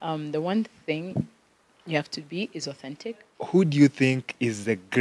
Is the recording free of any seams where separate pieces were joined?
no; 1 cut; at 3.3 s

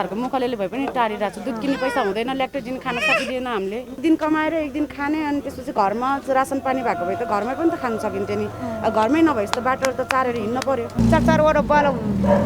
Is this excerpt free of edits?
no; 2 cuts; at 4.0 s, 11.0 s

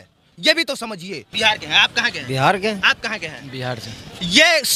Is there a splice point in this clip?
yes; 1 cut; at 1.2 s

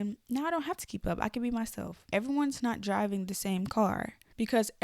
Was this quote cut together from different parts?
yes; 1 cut; at 2.0 s

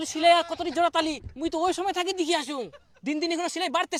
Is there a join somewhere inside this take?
no; 0 cuts

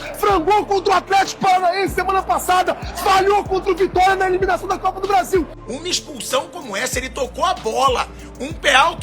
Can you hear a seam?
yes; 1 cut; at 5.6 s

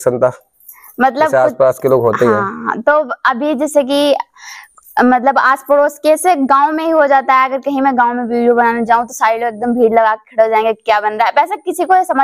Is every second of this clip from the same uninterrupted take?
yes; 0 cuts

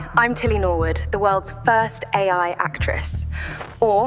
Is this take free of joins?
yes; 0 cuts

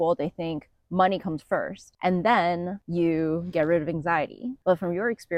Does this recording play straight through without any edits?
no; 3 cuts; at 1.8 s, 2.8 s, 4.5 s

